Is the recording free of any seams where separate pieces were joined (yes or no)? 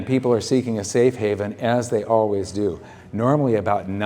yes